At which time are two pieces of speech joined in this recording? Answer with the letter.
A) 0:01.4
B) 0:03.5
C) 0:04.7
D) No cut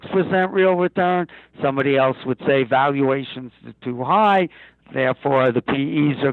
C